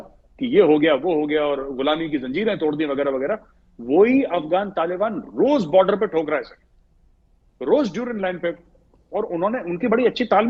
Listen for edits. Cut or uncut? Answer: uncut